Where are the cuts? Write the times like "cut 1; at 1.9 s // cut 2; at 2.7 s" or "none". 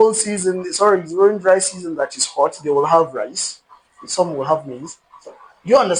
none